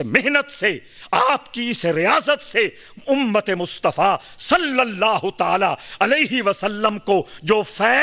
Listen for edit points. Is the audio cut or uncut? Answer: uncut